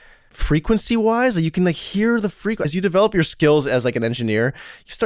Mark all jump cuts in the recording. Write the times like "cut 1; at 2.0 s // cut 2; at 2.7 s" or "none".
cut 1; at 2.6 s